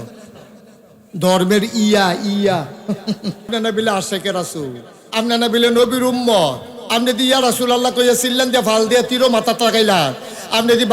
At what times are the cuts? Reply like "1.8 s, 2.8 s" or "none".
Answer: 3.5 s